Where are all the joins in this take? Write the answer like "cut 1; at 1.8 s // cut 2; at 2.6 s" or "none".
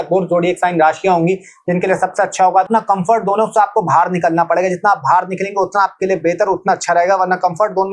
cut 1; at 2.6 s